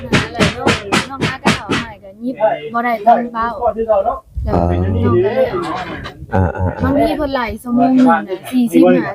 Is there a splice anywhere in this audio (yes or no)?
no